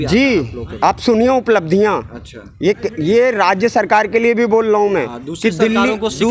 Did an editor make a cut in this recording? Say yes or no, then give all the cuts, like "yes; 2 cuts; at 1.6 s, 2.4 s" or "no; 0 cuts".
no; 0 cuts